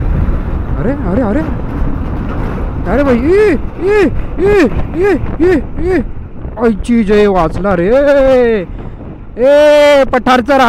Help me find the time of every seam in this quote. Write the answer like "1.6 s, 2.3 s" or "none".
none

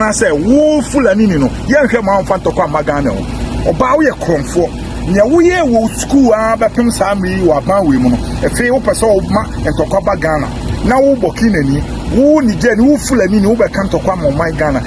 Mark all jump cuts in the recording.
none

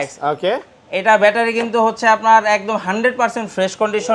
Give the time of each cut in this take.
none

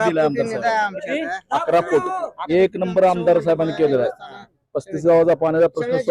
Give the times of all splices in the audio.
2.4 s

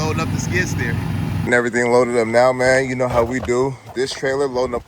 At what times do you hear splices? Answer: 1.4 s

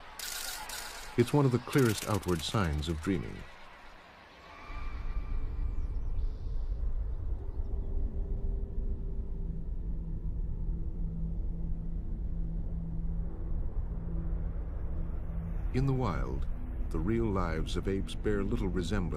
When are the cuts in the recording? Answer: 1.3 s

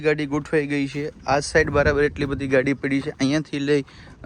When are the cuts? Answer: none

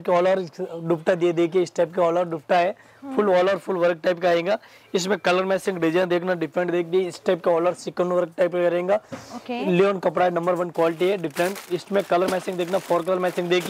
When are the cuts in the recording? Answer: none

